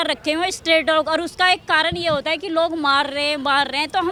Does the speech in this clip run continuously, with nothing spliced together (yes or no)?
yes